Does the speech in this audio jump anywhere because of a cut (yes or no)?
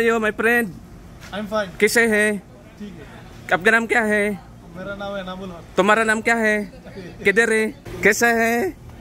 yes